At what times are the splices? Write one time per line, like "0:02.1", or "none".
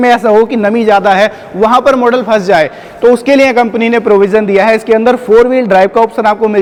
none